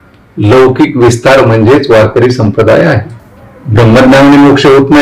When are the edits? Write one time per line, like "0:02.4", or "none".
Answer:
0:03.1